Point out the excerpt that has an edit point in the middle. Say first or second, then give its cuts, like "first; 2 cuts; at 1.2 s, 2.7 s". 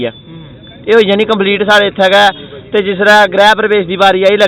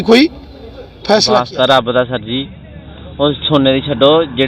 second; 1 cut; at 1.3 s